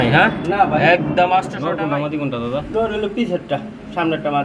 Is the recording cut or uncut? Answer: cut